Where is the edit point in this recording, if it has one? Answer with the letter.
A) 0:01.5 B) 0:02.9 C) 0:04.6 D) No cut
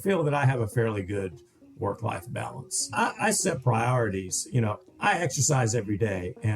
B